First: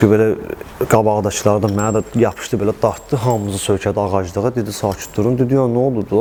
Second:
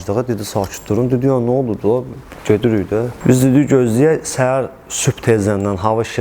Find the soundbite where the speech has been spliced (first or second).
second